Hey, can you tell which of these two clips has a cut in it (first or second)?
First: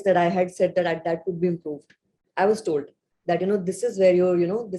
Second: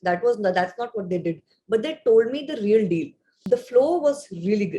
second